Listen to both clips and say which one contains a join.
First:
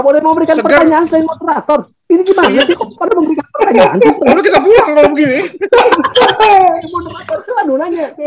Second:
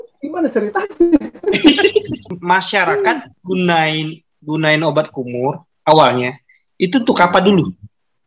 second; 1 cut; at 2.2 s

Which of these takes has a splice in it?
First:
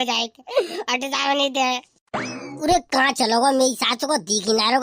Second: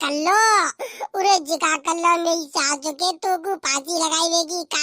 first; 1 cut; at 2.4 s

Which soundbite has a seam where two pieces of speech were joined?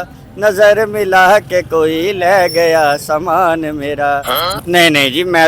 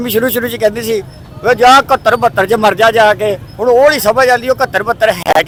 first; 1 cut; at 4.5 s

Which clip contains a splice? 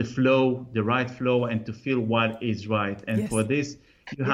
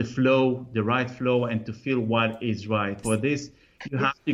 second; 1 cut; at 3.0 s

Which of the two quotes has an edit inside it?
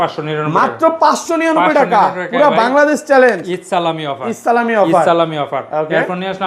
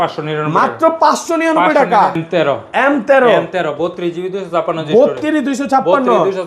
second; 1 cut; at 2.2 s

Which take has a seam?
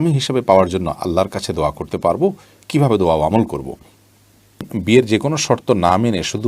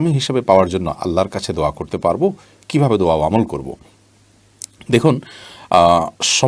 first; 1 cut; at 4.7 s

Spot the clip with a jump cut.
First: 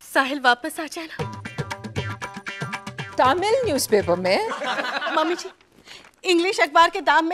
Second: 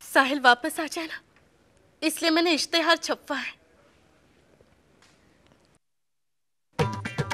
first; 2 cuts; at 1.1 s, 5.1 s

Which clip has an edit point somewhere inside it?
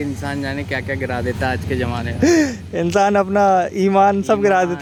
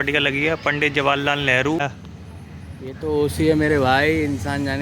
second; 1 cut; at 1.8 s

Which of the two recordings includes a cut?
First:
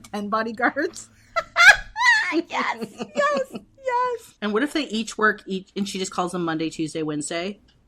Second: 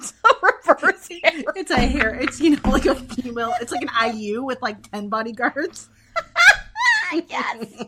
first; 1 cut; at 4.3 s

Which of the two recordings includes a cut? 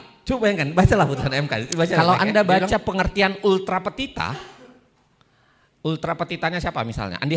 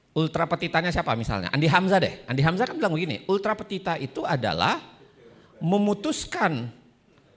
first; 1 cut; at 2.0 s

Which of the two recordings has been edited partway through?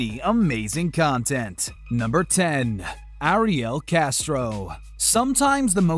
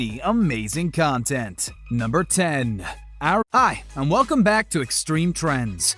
first; 1 cut; at 3.4 s

